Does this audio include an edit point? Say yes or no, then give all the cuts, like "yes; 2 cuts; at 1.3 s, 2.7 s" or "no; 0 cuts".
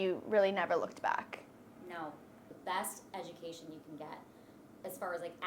yes; 1 cut; at 2.5 s